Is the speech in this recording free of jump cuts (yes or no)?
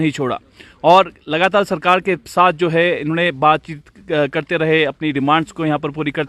yes